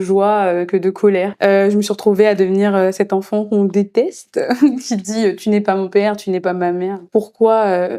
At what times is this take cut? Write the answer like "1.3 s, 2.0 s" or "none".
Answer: 1.3 s, 7.0 s